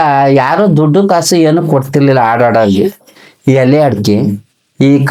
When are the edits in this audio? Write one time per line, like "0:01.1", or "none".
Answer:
none